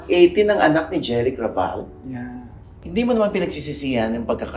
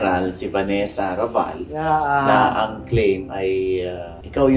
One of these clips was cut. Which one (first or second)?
first